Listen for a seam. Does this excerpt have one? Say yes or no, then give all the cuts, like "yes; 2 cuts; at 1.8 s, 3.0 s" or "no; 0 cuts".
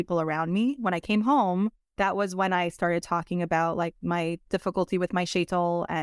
yes; 1 cut; at 1.8 s